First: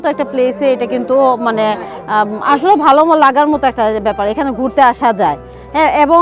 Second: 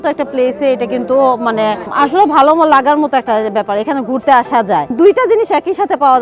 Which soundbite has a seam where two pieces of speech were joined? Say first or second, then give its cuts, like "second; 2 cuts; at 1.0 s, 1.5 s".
second; 2 cuts; at 1.9 s, 4.9 s